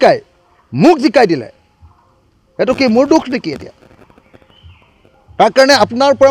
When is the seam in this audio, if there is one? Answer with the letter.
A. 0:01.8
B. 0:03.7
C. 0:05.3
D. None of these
D